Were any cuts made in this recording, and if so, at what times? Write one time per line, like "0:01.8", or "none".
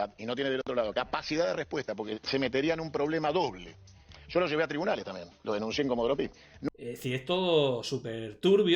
0:06.6

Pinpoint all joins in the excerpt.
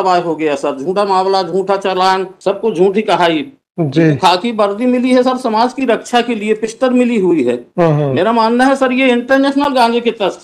0:02.3

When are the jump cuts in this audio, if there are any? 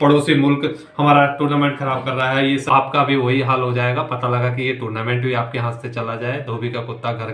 0:02.7

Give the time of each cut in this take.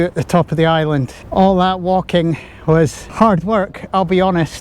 0:01.2
0:03.0

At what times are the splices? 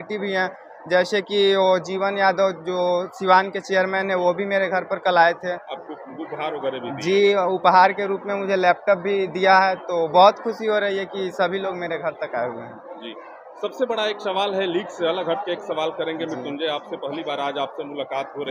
none

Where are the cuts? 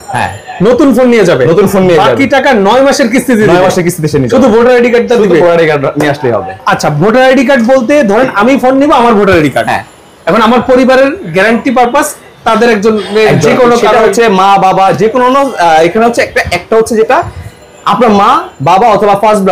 none

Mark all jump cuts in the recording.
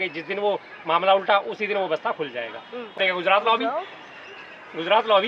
0:03.0

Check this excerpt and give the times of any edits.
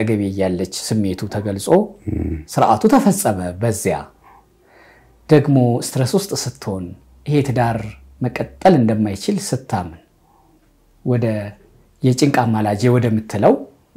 none

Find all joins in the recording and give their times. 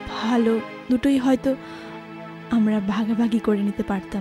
none

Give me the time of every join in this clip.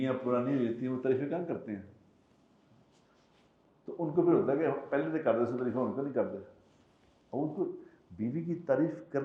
none

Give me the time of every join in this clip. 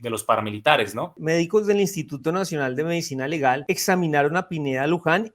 0:01.2
0:03.6

